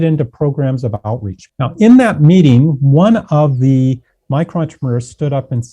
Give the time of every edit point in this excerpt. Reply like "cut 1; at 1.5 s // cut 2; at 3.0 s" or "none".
cut 1; at 1.4 s